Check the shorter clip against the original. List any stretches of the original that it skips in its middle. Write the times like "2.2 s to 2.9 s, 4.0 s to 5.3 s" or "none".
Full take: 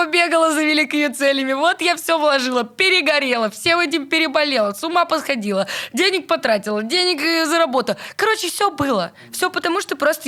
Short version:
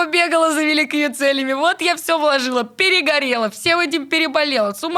none